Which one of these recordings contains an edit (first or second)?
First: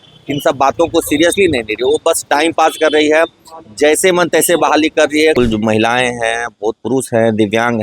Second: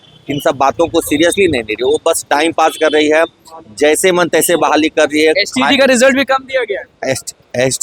first